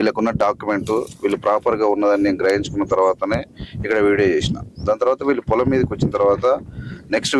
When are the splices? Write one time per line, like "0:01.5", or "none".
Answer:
none